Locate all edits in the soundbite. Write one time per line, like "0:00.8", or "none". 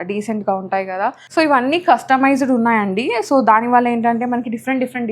0:01.2

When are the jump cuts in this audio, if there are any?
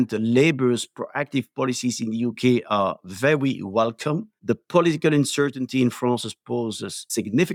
none

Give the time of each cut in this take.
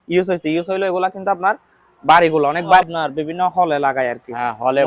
0:02.8

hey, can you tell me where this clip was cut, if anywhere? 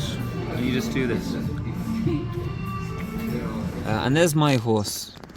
0:03.8

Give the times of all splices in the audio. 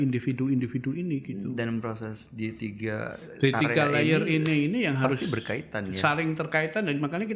none

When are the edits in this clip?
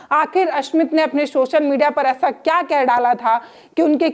none

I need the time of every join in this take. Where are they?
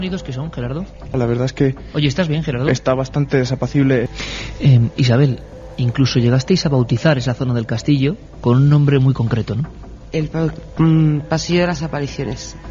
0:01.1
0:04.1

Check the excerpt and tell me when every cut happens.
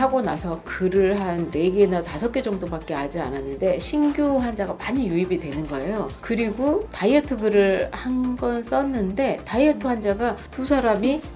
none

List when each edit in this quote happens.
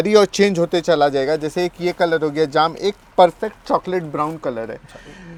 none

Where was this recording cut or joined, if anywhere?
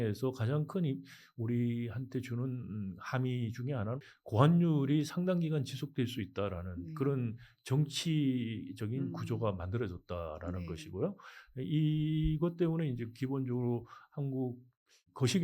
none

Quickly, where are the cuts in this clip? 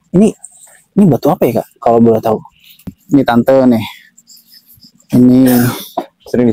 0:02.9

